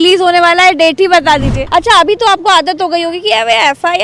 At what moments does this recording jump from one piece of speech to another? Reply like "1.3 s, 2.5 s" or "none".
1.6 s